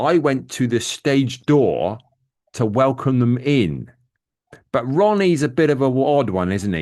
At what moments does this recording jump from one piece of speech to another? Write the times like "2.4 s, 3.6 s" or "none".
none